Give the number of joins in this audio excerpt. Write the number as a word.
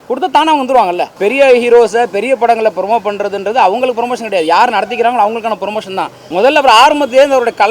two